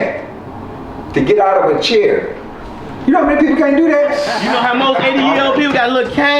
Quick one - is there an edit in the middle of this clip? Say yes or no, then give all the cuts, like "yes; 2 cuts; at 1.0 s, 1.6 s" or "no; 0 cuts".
yes; 1 cut; at 4.4 s